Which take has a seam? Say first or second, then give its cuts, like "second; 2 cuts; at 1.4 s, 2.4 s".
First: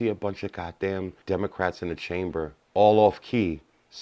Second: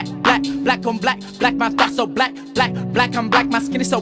first; 2 cuts; at 1.2 s, 2.6 s